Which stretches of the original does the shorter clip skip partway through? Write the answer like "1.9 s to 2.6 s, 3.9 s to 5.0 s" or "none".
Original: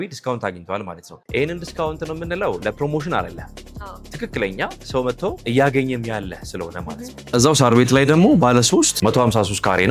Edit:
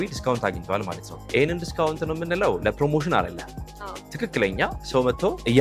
none